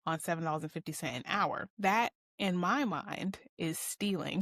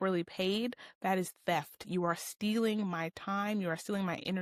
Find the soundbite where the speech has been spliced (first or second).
first